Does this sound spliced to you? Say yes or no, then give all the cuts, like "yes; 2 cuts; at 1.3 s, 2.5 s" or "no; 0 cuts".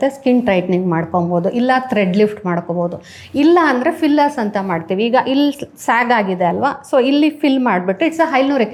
no; 0 cuts